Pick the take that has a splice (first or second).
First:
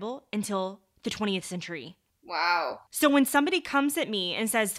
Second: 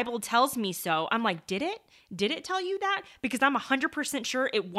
first